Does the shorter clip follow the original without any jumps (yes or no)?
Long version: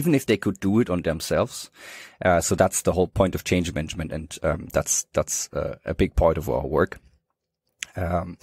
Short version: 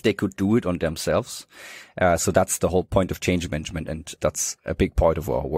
no